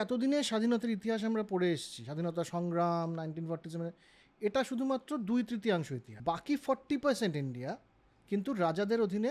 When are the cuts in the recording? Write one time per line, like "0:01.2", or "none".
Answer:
0:06.0